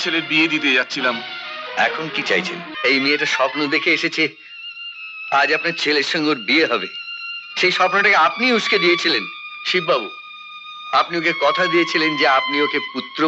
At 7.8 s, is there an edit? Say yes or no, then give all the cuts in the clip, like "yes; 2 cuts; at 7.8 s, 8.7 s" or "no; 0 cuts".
no; 1 cut; at 2.7 s